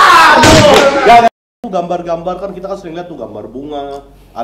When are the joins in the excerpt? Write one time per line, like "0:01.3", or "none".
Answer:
0:01.3